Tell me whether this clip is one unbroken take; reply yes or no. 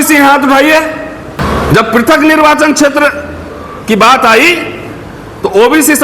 no